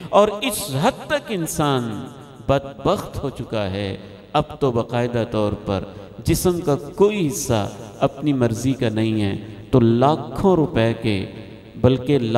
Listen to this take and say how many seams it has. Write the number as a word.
zero